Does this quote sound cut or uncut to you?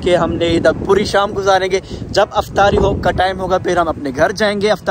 uncut